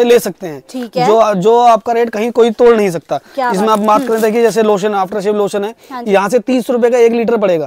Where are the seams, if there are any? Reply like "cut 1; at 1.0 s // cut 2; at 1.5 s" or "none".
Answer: none